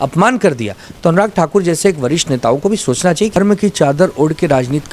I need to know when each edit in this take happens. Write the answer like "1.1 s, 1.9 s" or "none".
3.4 s